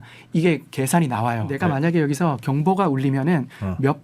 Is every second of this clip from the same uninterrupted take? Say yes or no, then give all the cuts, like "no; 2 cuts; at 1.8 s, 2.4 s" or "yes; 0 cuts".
no; 1 cut; at 1.5 s